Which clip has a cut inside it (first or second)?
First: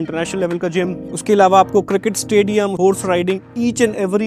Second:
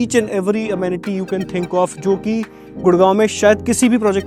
first